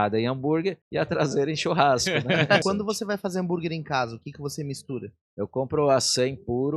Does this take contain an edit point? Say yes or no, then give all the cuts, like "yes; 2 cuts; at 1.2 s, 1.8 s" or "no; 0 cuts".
yes; 3 cuts; at 0.8 s, 2.6 s, 5.2 s